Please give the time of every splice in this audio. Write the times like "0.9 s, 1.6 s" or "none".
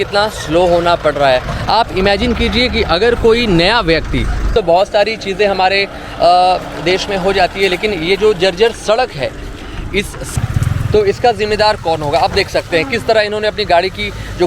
4.5 s, 10.3 s

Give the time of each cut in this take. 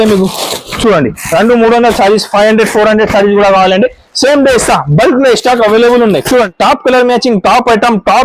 6.5 s

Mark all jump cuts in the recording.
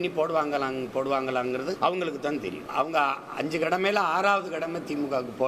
1.8 s, 2.6 s

